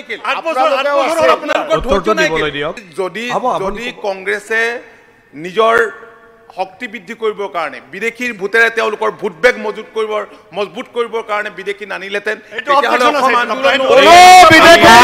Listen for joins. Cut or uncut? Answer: cut